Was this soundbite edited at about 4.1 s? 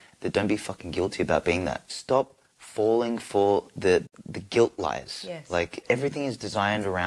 yes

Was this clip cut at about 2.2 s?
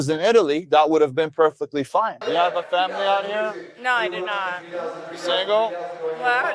yes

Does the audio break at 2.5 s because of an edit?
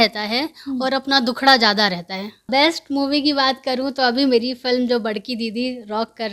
yes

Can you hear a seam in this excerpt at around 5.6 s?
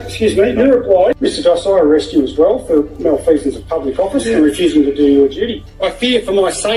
yes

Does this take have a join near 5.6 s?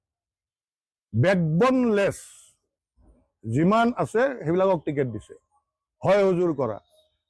no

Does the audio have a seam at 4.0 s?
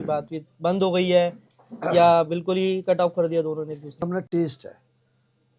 yes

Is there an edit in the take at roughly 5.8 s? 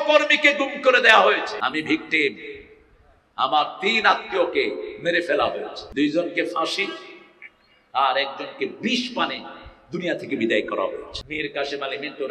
yes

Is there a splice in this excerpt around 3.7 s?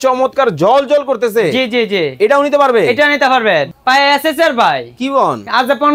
yes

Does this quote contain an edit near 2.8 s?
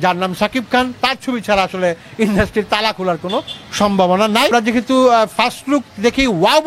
no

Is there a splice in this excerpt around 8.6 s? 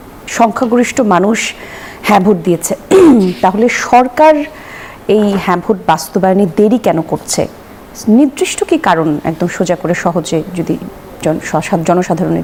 no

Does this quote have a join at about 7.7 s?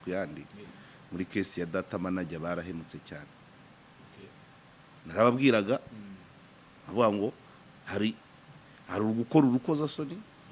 no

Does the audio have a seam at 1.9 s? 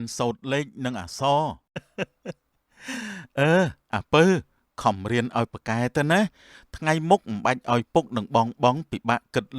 yes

